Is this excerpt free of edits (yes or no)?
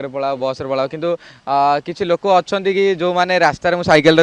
yes